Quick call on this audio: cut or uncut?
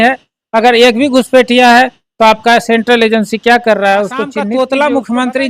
cut